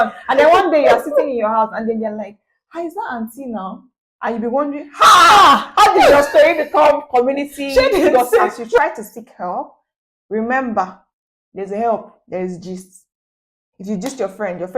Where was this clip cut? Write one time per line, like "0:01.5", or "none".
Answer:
0:08.8